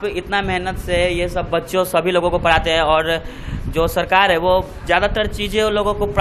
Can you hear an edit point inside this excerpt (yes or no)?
no